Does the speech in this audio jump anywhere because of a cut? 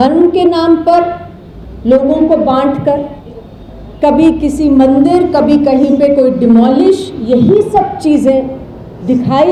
no; 0 cuts

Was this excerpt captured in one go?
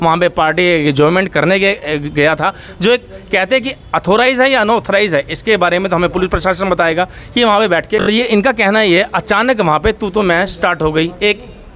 no; 1 cut; at 8.1 s

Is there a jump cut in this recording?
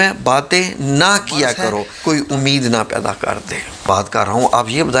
yes; 2 cuts; at 1.9 s, 3.9 s

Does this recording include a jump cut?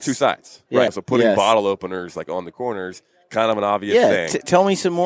yes; 1 cut; at 1.0 s

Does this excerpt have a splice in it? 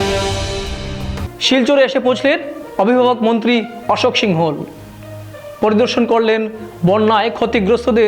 yes; 1 cut; at 1.1 s

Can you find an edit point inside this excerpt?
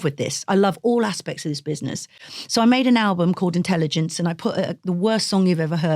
no; 0 cuts

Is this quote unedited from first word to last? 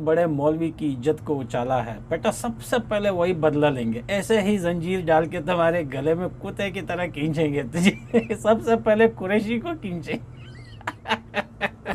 yes; 0 cuts

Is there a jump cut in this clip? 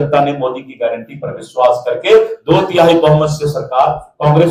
no; 0 cuts

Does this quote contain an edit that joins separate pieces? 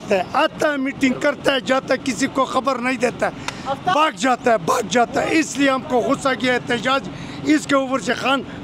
no; 0 cuts

